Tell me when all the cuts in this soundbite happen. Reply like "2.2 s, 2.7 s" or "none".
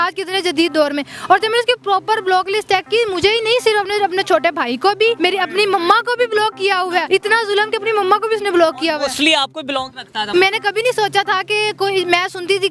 5.2 s, 7.1 s, 10.1 s